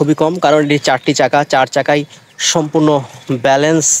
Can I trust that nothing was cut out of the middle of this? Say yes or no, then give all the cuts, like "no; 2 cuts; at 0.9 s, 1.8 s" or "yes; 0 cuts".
yes; 0 cuts